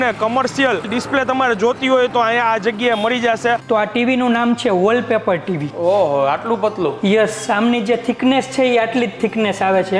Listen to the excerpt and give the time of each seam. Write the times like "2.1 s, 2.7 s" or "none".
3.6 s